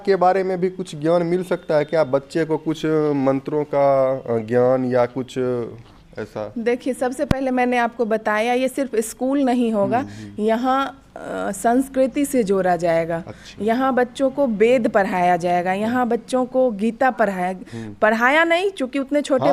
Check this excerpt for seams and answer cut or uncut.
uncut